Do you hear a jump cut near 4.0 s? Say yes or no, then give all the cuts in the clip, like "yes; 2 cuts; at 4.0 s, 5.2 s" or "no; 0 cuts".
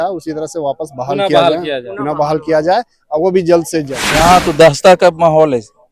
yes; 1 cut; at 4.0 s